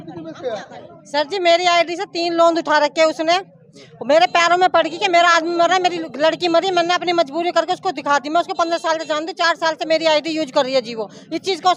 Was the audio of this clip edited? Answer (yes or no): no